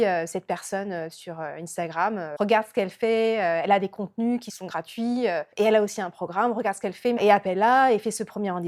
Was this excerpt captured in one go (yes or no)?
yes